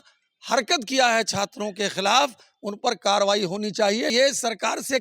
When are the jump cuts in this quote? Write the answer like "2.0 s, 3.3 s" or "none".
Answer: 4.1 s